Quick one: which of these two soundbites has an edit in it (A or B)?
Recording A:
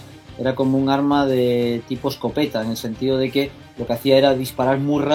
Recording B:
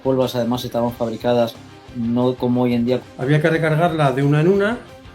B